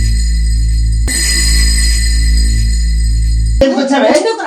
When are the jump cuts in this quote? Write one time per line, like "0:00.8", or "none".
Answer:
0:01.0
0:03.5